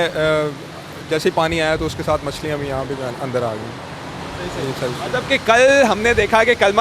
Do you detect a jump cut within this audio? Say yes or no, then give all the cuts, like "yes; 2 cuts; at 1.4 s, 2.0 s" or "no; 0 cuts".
no; 0 cuts